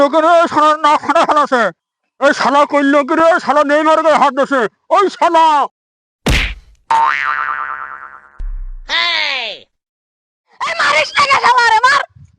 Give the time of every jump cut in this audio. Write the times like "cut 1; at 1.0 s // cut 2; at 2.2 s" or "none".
cut 1; at 10.7 s